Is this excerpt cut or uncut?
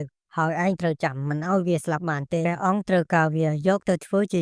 uncut